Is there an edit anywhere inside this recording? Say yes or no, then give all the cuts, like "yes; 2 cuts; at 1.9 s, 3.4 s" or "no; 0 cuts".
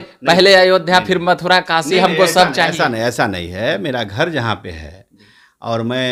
no; 0 cuts